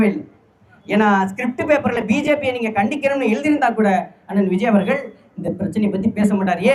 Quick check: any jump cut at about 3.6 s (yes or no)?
no